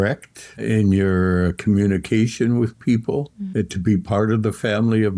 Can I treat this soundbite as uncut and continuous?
yes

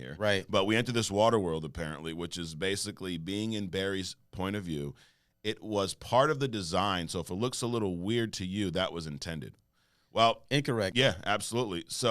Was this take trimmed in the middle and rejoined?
yes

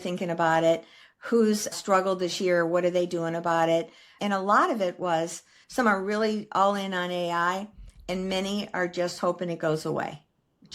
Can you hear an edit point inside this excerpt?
yes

